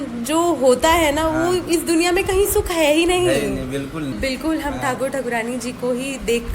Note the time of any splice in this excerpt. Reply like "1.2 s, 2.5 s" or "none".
4.1 s